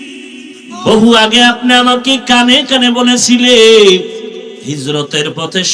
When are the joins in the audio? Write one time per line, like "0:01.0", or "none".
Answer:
none